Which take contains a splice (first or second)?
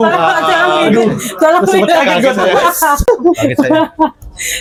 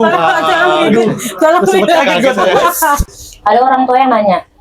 second